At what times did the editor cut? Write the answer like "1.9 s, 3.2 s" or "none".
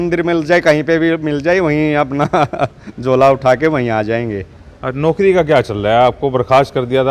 none